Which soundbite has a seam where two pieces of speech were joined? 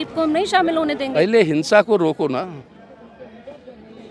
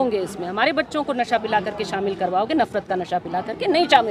first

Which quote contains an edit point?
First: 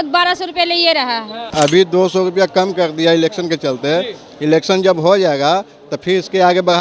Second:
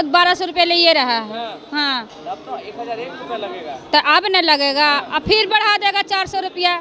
first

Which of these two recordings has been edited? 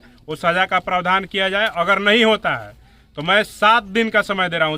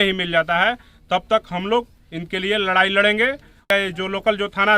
second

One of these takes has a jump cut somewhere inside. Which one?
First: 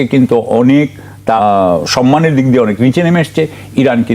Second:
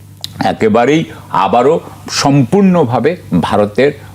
first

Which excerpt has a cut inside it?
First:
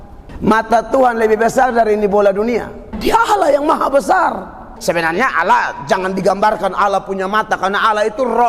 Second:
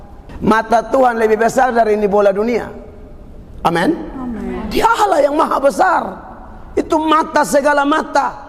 first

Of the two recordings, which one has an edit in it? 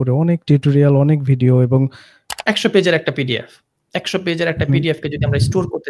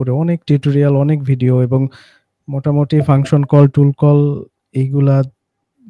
first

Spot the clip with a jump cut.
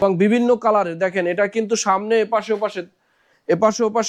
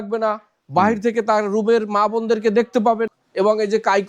second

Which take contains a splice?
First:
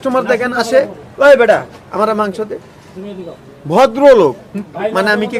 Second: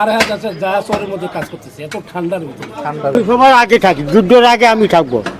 second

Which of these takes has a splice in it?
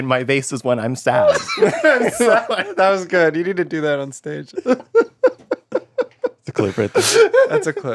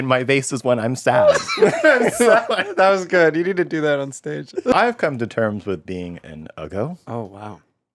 second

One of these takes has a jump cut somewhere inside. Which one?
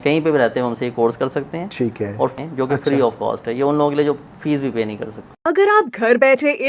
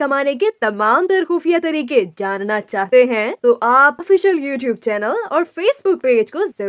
first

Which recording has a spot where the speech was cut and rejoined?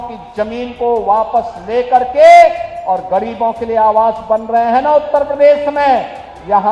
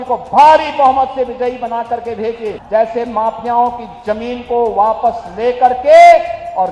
second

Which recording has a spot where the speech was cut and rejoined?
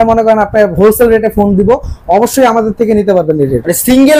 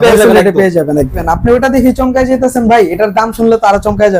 second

